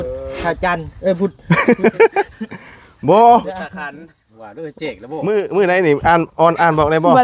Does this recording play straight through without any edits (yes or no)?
no